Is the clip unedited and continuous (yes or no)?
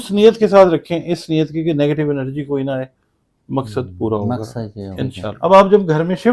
no